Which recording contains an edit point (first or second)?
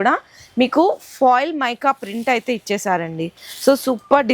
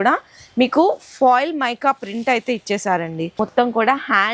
second